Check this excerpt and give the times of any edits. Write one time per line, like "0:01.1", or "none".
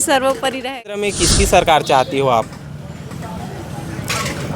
0:01.1